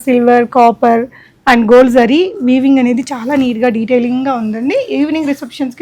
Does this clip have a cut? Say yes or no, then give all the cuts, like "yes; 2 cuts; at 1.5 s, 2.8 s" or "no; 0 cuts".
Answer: no; 0 cuts